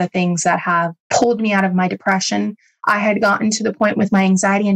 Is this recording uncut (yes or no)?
no